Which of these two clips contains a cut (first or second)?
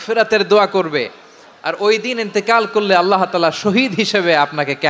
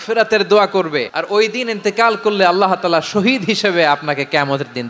second